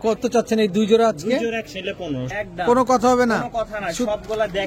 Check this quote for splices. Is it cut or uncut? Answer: cut